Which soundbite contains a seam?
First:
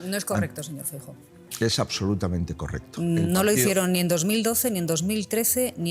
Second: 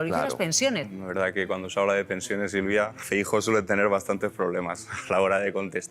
second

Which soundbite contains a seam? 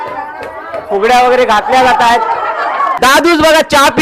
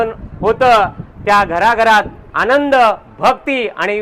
first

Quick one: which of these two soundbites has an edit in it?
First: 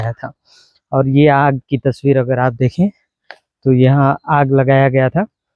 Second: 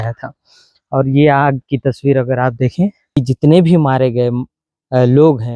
second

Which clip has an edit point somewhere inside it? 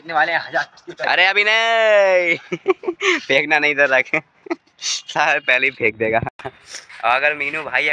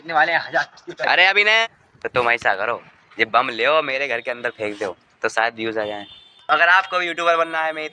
second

